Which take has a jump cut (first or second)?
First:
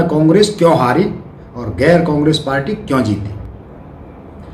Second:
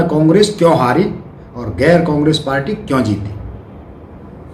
first